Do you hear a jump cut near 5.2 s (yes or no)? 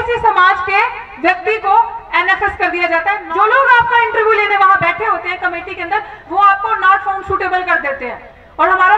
no